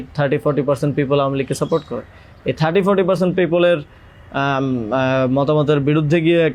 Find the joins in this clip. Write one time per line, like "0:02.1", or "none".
none